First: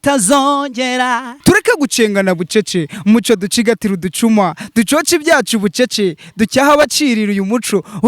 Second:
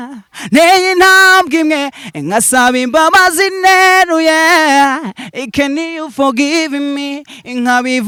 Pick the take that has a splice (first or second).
first